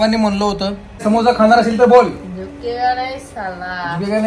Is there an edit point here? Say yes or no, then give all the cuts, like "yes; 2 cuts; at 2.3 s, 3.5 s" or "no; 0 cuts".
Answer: yes; 1 cut; at 1.0 s